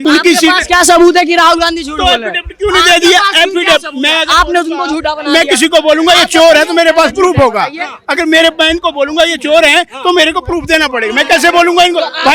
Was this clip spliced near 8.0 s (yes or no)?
no